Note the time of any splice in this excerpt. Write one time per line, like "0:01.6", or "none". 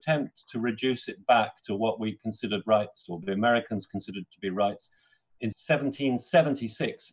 none